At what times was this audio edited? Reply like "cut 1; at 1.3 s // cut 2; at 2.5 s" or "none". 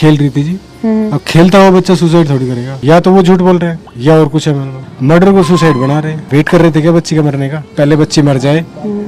cut 1; at 2.7 s // cut 2; at 4.7 s // cut 3; at 6.2 s

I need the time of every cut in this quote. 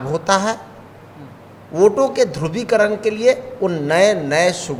none

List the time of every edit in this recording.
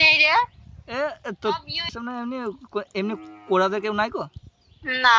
cut 1; at 2.0 s

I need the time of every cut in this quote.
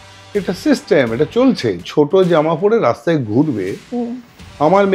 cut 1; at 1.8 s

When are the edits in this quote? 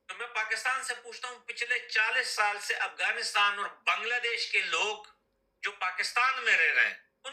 none

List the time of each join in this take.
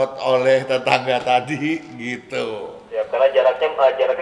none

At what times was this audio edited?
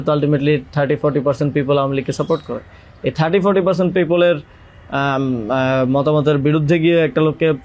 none

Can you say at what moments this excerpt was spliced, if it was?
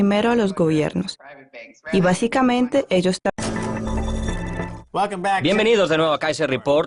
none

